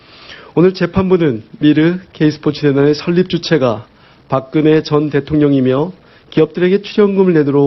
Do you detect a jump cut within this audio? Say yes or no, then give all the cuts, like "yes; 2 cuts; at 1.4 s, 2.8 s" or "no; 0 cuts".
yes; 1 cut; at 2.0 s